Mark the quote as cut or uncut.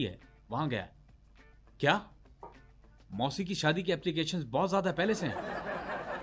uncut